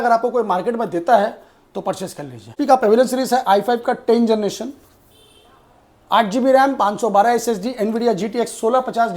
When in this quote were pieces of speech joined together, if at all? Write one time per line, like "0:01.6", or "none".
0:02.5